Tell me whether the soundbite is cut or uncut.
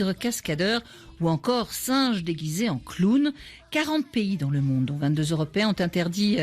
cut